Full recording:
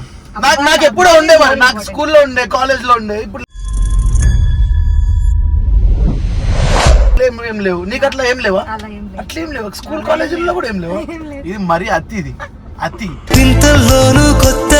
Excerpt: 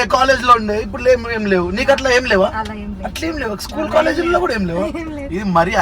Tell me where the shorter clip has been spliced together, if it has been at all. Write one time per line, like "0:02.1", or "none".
0:01.0

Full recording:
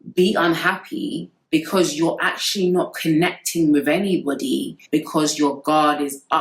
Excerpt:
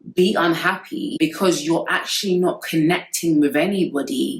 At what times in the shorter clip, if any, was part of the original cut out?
0:01.1

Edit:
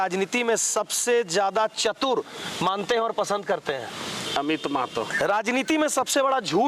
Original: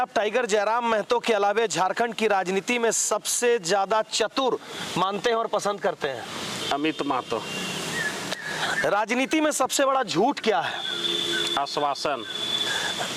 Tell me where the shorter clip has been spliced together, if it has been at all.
0:05.1

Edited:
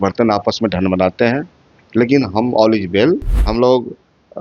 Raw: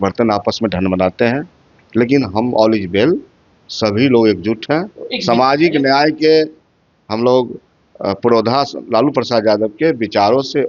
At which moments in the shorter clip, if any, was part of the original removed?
0:03.4

